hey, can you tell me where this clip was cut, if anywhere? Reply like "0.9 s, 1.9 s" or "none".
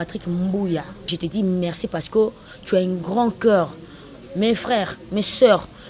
1.1 s